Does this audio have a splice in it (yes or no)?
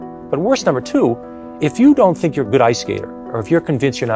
no